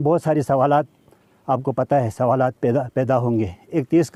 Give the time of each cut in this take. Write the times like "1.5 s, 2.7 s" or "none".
none